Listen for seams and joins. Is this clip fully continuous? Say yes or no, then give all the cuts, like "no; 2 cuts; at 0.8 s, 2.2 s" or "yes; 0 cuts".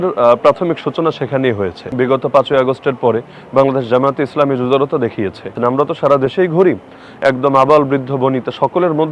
no; 2 cuts; at 1.8 s, 5.5 s